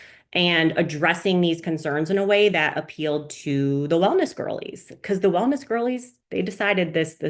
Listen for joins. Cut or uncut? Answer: cut